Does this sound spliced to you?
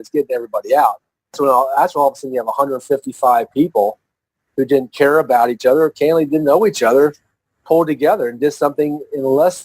yes; 1 cut; at 1.4 s

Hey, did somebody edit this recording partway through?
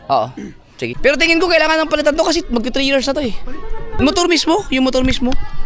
yes; 2 cuts; at 1.0 s, 4.0 s

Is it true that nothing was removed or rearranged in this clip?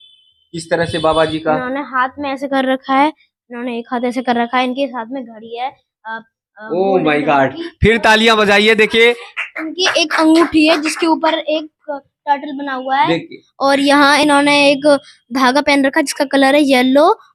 yes; 0 cuts

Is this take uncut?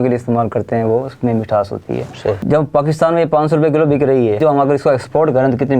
no; 2 cuts; at 2.4 s, 4.4 s

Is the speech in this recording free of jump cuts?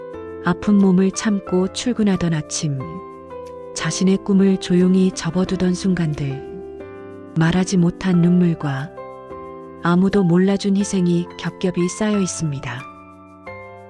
yes; 0 cuts

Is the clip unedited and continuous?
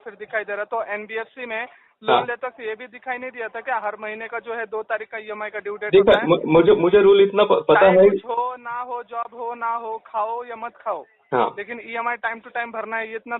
yes; 0 cuts

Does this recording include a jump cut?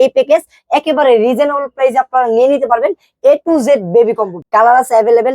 yes; 1 cut; at 4.3 s

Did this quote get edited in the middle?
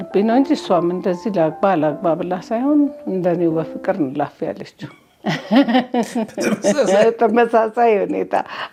no; 0 cuts

